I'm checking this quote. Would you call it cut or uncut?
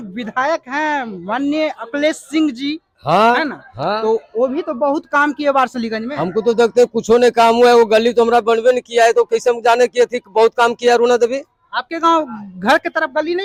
uncut